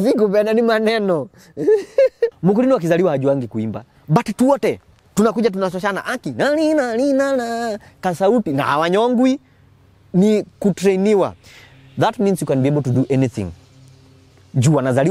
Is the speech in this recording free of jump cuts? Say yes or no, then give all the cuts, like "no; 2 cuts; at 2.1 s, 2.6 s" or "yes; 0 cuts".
no; 1 cut; at 2.4 s